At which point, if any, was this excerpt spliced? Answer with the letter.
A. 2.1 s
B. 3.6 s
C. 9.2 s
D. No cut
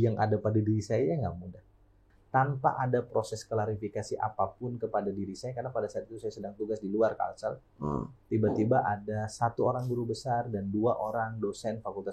A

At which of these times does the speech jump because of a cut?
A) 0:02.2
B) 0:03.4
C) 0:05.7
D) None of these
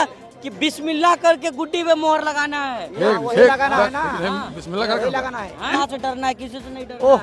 C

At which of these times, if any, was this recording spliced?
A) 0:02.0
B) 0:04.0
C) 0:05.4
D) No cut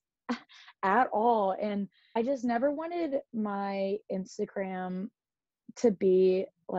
A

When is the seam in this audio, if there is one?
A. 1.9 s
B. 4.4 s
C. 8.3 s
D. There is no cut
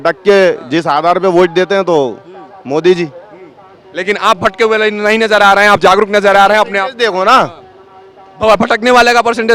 D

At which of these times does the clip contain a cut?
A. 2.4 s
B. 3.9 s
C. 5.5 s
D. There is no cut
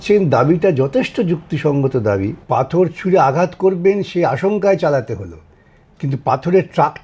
A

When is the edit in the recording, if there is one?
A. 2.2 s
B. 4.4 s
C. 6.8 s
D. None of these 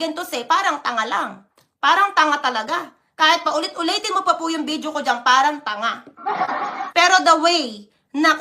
C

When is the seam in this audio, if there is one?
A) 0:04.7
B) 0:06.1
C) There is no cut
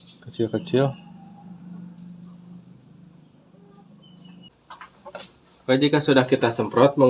A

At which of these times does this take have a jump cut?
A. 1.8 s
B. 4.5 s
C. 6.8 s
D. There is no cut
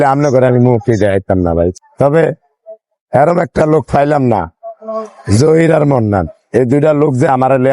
A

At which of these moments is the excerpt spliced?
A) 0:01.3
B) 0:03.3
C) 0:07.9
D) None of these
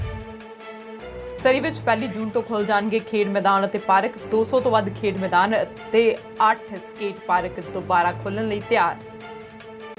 A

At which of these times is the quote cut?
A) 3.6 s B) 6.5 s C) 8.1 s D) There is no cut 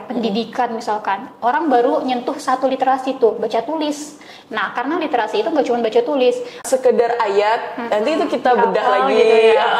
B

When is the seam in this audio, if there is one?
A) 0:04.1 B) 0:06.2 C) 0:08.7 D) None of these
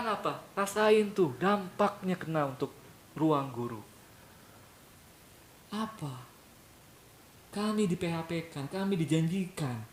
D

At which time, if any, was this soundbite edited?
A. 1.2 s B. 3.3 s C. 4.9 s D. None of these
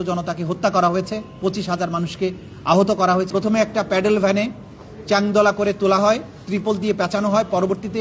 B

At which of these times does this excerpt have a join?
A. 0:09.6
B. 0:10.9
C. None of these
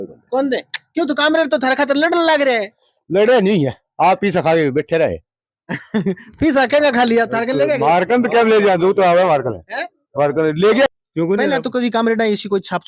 B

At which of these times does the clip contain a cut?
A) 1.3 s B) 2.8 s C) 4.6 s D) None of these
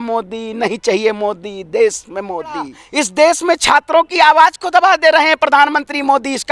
B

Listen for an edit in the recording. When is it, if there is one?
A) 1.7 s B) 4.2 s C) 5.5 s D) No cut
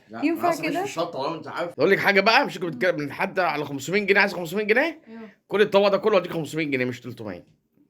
A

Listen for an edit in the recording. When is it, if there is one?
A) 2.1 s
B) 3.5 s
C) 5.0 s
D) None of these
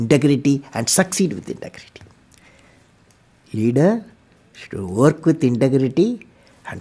D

